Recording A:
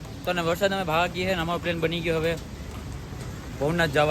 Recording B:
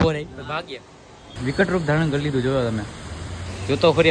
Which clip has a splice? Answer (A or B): B